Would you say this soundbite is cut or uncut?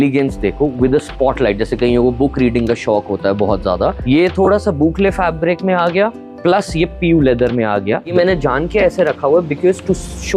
cut